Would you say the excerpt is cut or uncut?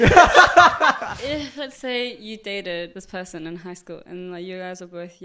cut